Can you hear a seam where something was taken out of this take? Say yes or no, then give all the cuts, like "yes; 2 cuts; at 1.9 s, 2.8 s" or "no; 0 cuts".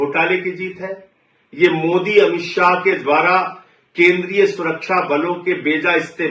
no; 0 cuts